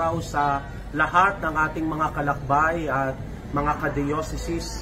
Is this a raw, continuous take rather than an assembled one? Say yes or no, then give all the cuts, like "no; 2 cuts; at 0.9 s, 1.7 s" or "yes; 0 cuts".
yes; 0 cuts